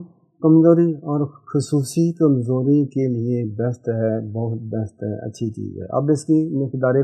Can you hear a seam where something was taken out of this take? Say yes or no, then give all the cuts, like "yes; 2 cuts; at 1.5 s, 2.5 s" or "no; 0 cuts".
no; 0 cuts